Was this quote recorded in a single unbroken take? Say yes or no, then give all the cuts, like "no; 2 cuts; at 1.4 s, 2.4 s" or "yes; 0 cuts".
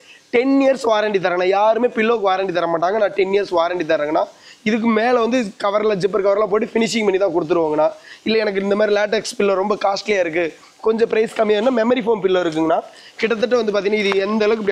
yes; 0 cuts